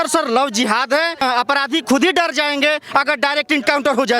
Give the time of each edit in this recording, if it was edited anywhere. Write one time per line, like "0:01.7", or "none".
0:01.2